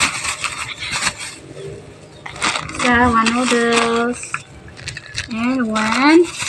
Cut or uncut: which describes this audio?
uncut